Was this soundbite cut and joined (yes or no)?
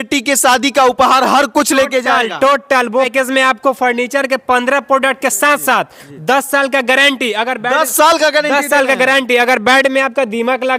yes